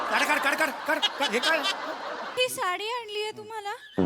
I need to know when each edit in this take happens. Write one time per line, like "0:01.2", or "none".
0:02.3